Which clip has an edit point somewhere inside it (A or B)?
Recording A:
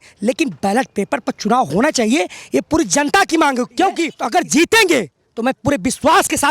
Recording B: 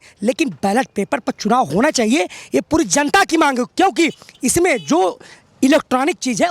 A